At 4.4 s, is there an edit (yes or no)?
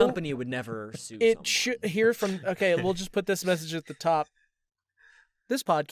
no